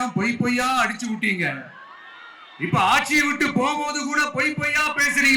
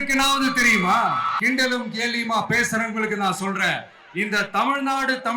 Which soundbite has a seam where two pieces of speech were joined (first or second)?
second